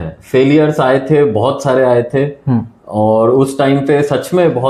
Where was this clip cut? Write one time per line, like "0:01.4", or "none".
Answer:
none